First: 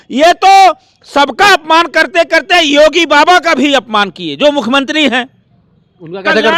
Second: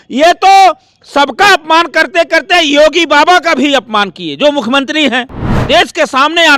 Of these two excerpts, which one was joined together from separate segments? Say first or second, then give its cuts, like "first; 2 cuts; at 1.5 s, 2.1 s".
second; 1 cut; at 5.6 s